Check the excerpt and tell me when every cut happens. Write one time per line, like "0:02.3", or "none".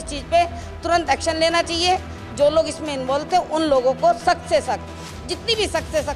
none